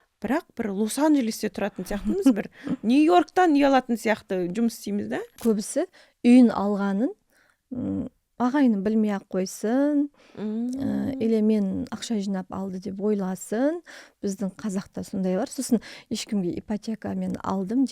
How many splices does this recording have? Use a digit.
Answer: 1